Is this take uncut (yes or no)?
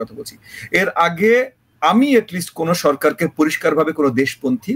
yes